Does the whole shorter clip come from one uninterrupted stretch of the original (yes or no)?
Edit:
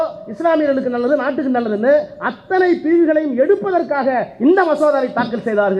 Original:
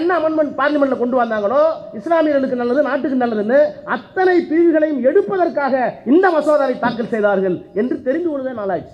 yes